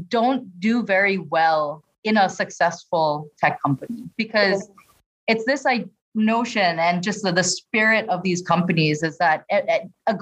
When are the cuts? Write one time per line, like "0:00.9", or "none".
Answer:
0:06.0